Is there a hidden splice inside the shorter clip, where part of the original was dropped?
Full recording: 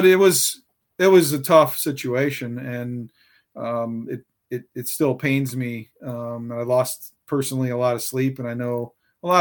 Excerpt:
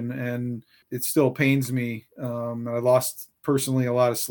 yes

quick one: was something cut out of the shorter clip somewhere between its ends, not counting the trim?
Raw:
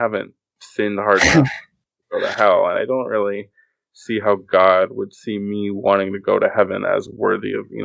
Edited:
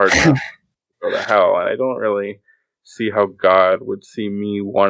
no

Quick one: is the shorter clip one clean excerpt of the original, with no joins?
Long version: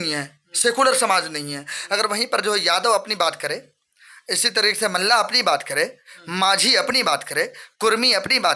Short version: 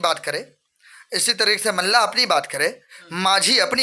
yes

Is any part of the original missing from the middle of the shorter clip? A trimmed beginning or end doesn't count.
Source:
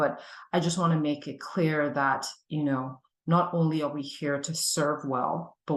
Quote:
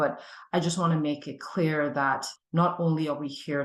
yes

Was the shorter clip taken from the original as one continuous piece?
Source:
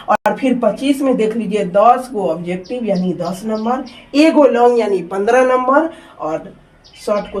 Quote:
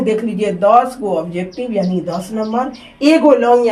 yes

